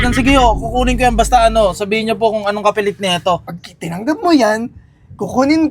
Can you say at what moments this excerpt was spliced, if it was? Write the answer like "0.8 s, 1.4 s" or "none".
3.5 s